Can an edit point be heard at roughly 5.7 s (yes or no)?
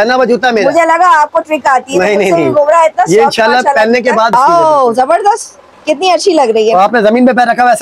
no